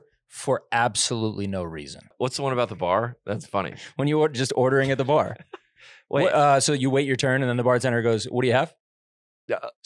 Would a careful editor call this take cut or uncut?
cut